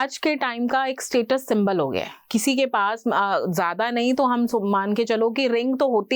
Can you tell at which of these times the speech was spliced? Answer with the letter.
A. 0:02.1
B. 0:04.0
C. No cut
A